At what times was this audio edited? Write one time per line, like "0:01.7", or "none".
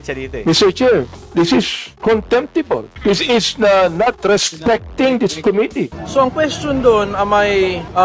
0:02.9
0:06.0